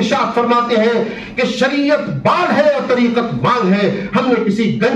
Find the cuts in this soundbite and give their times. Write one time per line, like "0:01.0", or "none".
none